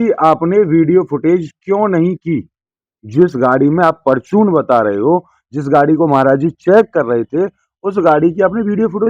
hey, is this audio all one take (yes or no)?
yes